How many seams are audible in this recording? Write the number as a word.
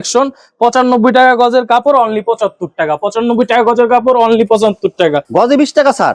zero